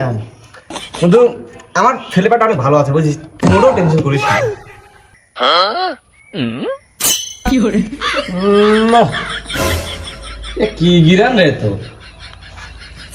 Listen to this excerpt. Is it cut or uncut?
uncut